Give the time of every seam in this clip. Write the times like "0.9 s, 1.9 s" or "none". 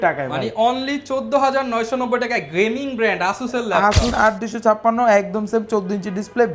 4.1 s